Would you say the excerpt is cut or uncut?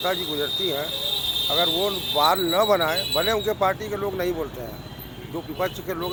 uncut